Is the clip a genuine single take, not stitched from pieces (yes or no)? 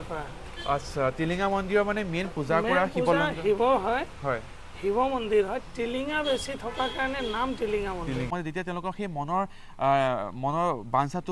no